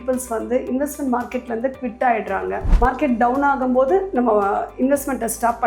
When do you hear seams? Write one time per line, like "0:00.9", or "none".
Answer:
0:02.6